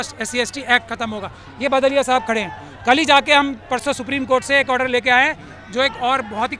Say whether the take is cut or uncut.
uncut